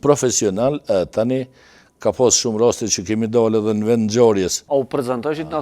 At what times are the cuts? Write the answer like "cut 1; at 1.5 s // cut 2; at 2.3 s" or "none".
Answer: cut 1; at 4.6 s

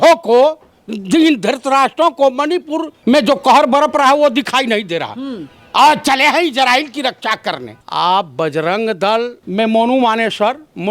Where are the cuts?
cut 1; at 2.9 s // cut 2; at 7.8 s // cut 3; at 9.4 s

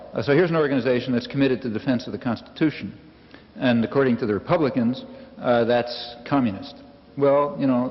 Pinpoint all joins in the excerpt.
none

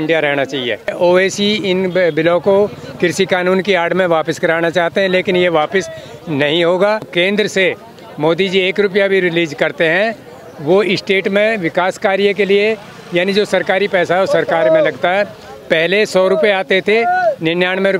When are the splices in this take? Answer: cut 1; at 0.9 s // cut 2; at 7.1 s

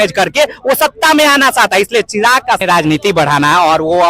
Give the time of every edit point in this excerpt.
cut 1; at 2.6 s

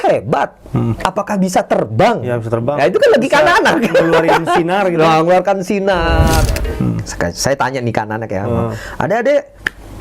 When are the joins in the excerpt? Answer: cut 1; at 6.6 s

